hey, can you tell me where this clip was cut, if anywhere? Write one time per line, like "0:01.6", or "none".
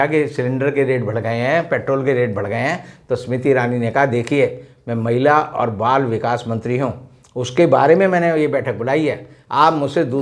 none